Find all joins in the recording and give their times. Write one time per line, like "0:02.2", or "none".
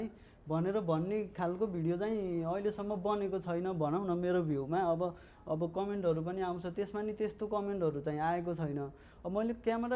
none